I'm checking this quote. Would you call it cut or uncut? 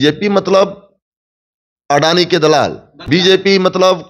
cut